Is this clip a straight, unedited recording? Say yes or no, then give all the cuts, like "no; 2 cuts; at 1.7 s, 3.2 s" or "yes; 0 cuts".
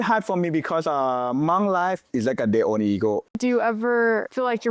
no; 1 cut; at 3.3 s